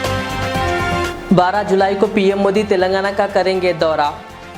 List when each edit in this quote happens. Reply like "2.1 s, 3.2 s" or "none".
0.9 s